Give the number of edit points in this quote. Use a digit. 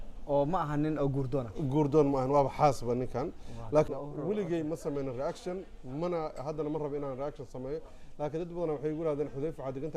1